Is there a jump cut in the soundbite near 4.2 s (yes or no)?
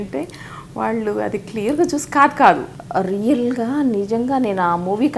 no